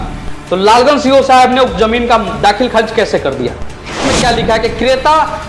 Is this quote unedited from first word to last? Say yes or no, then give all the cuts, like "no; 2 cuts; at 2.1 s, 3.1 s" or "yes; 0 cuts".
no; 1 cut; at 4.0 s